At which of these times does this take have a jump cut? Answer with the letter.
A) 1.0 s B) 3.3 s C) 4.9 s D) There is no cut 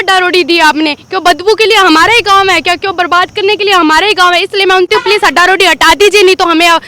C